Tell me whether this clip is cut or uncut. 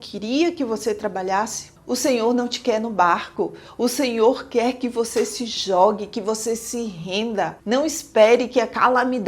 cut